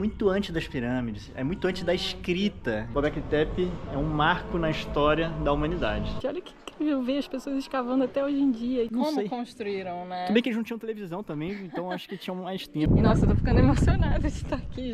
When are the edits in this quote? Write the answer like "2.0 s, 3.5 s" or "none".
2.9 s, 6.2 s, 8.9 s, 12.9 s